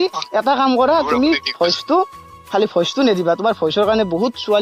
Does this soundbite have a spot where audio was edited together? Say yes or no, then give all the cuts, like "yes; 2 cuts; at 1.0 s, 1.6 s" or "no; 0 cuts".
no; 0 cuts